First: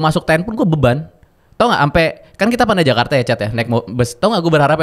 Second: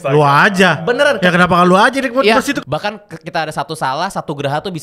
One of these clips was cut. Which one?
second; 1 cut; at 2.6 s

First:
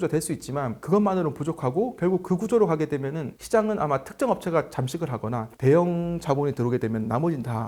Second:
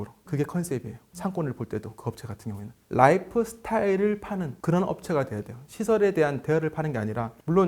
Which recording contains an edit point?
second; 1 cut; at 2.8 s

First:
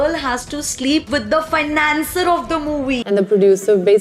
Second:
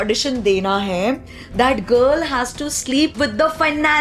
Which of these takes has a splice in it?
first; 1 cut; at 3.0 s

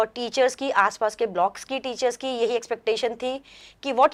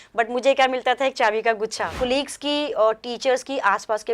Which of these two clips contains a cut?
second; 1 cut; at 1.9 s

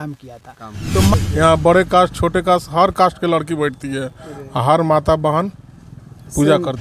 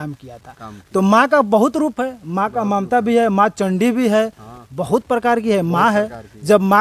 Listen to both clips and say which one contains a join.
first; 1 cut; at 1.1 s

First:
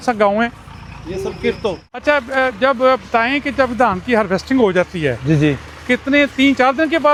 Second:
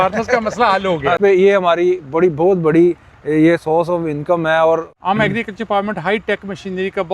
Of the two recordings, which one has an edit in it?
second; 2 cuts; at 1.2 s, 4.9 s

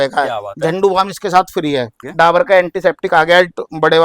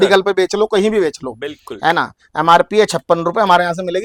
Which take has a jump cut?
first; 1 cut; at 2.0 s

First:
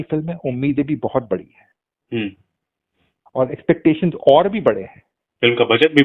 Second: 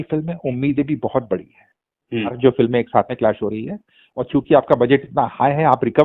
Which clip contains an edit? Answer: second; 1 cut; at 2.3 s

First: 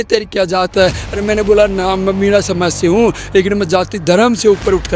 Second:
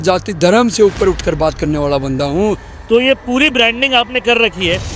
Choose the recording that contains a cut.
second; 1 cut; at 2.6 s

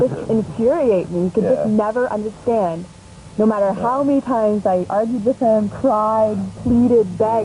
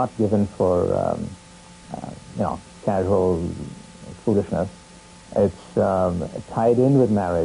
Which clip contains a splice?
second; 1 cut; at 3.0 s

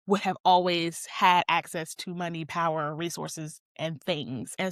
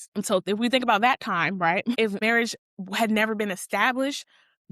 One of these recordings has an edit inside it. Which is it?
second; 1 cut; at 2.1 s

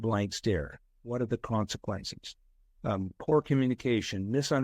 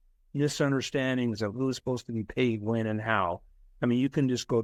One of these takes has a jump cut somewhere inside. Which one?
first; 1 cut; at 1.0 s

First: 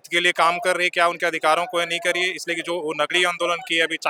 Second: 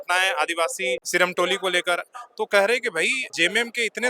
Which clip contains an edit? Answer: second; 2 cuts; at 1.0 s, 3.2 s

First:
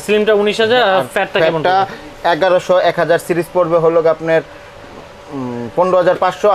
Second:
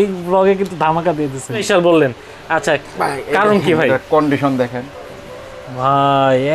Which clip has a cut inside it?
second; 1 cut; at 1.6 s

